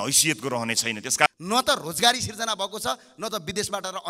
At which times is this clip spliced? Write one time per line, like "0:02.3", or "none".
0:01.3